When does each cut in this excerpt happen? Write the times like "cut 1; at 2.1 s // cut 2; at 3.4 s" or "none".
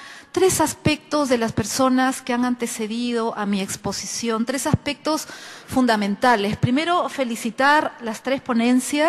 cut 1; at 2.6 s